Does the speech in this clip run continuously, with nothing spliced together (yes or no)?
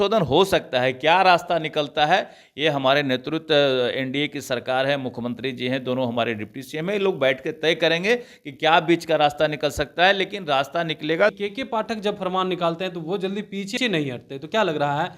no